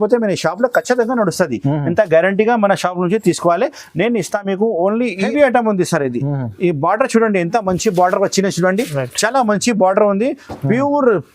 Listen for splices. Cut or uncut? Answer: cut